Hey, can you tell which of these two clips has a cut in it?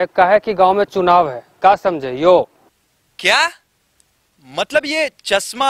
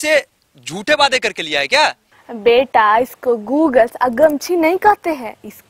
first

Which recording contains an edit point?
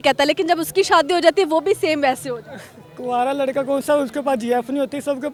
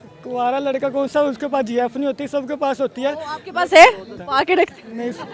second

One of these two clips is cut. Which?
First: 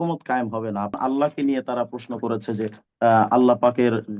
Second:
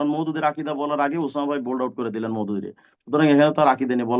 first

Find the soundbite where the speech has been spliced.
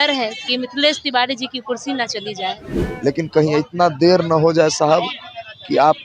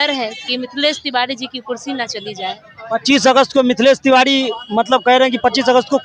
first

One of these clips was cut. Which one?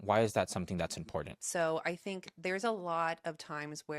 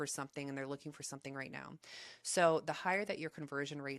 first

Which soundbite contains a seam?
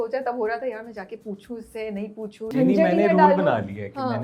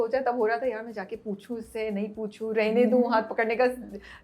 first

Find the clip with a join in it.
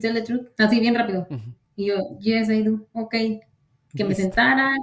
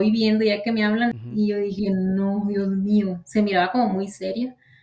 second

